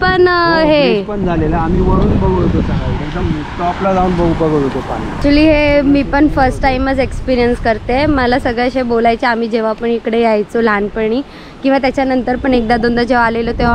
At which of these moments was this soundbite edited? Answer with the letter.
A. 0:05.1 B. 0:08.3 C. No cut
A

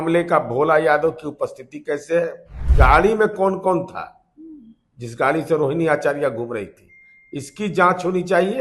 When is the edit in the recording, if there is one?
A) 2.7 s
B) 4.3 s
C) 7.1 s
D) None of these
A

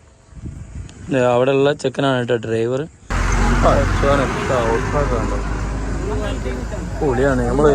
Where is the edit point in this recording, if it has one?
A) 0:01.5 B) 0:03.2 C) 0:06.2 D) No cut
B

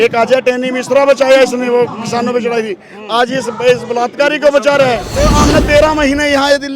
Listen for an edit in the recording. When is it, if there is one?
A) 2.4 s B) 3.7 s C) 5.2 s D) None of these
C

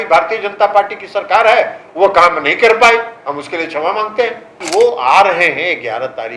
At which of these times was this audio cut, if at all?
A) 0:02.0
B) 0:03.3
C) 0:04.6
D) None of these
C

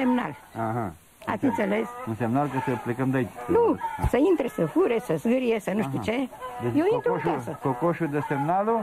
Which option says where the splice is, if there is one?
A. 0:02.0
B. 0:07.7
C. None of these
A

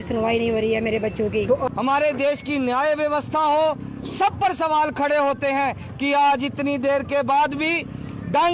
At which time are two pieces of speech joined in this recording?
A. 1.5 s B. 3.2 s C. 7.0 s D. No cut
A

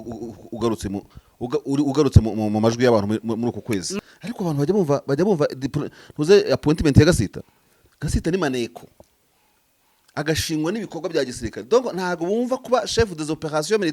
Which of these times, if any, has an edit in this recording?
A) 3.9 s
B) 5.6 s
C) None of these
A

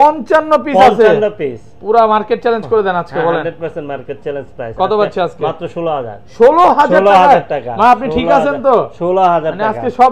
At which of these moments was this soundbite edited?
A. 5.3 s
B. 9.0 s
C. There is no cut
C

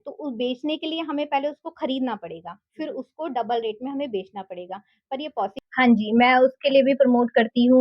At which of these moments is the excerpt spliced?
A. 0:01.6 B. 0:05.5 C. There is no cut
B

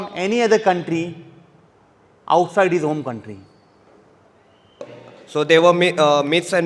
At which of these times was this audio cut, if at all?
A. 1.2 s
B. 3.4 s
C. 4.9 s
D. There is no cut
C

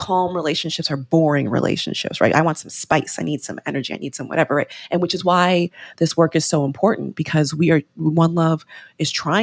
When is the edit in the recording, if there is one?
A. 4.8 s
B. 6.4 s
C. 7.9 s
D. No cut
A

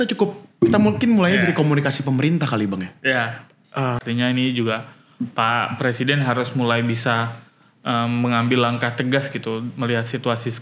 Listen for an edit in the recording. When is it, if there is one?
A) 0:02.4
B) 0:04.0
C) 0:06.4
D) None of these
B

